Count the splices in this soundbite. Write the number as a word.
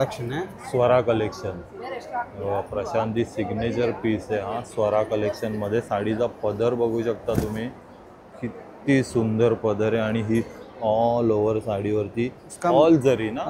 zero